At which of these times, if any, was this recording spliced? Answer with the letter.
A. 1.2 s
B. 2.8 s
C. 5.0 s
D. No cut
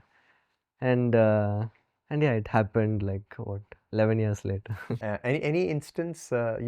C